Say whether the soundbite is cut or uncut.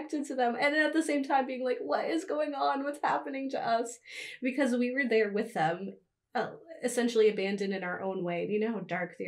uncut